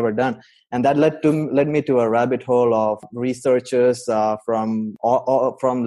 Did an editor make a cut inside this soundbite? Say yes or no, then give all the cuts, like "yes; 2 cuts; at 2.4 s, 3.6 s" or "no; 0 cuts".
yes; 2 cuts; at 3.1 s, 4.9 s